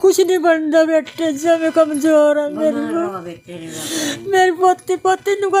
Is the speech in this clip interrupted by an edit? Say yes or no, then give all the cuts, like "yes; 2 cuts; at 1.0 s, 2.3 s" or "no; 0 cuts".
no; 0 cuts